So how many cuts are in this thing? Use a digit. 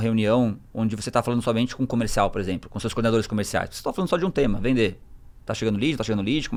0